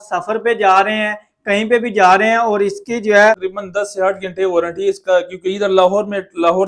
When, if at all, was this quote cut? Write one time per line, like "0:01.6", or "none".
0:03.5